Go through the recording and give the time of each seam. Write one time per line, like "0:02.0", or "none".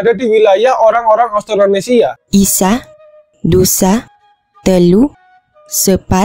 0:02.2